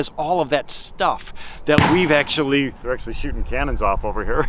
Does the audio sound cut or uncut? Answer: uncut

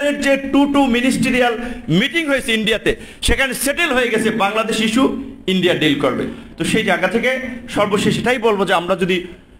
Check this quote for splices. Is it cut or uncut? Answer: uncut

